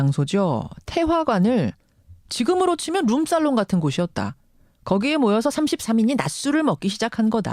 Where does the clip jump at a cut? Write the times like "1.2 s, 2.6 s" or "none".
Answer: none

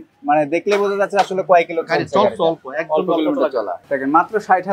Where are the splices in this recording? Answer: 3.8 s

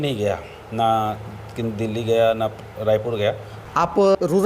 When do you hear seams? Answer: 3.5 s

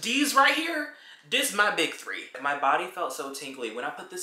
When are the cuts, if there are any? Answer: 2.4 s

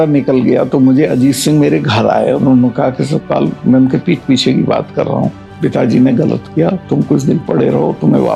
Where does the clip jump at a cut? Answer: none

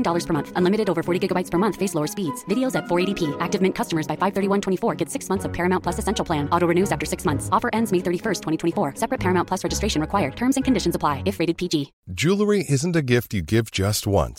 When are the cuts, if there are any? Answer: 12.0 s

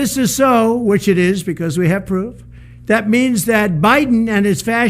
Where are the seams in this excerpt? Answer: 1.2 s

